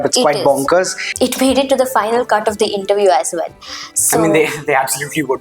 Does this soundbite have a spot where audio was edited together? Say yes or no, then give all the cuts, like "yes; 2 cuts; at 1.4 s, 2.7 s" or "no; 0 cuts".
yes; 1 cut; at 1.0 s